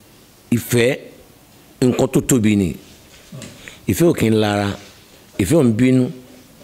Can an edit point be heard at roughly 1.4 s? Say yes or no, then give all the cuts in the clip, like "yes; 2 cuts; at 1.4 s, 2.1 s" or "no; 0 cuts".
no; 0 cuts